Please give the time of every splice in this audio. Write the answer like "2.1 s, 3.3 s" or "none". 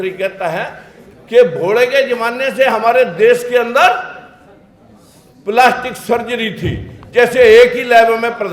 none

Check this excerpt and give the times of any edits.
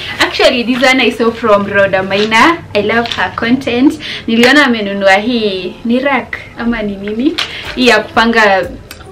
none

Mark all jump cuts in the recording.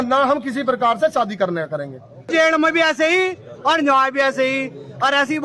2.3 s

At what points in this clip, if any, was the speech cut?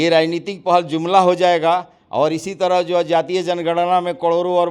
none

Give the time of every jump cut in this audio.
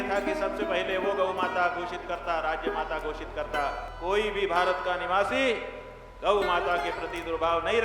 3.9 s

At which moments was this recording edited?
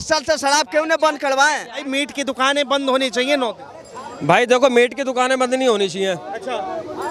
1.8 s

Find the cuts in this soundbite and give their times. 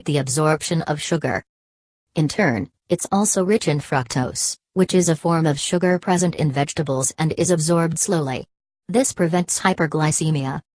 none

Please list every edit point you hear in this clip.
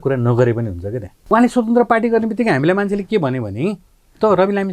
1.1 s

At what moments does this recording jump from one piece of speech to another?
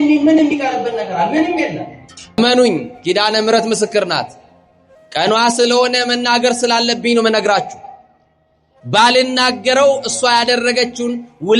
2.4 s

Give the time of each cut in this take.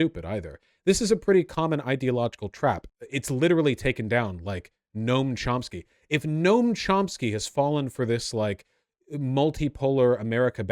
2.9 s

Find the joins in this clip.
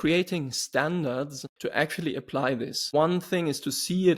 1.4 s, 2.8 s

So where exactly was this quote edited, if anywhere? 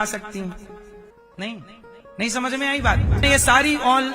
1.2 s, 3.2 s

